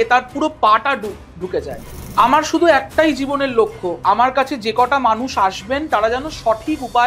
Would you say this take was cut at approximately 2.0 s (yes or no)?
yes